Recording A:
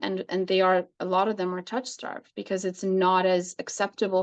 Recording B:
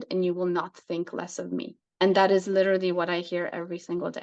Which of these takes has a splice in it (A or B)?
B